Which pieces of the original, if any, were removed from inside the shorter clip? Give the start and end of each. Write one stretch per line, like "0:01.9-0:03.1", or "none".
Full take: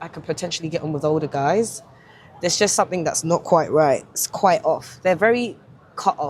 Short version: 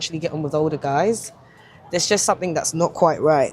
none

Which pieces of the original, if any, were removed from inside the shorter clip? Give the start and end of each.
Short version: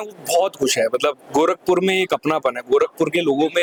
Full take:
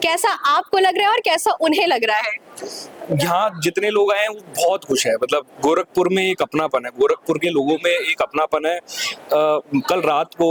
none

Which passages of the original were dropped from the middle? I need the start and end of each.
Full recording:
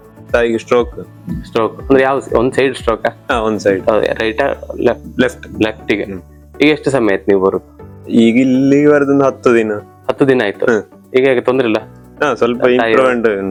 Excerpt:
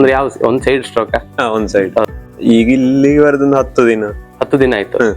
0:04.0-0:07.7

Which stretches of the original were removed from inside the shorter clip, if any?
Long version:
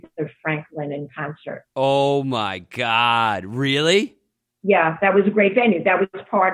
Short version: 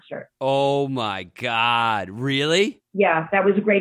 0:04.2-0:04.5

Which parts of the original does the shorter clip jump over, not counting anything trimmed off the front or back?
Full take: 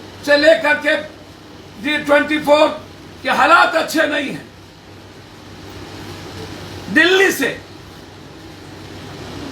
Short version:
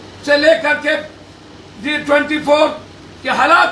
none

